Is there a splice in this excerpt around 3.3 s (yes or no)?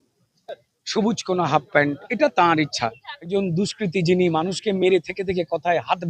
yes